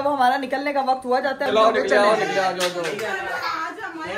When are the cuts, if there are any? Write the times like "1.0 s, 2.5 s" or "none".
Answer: none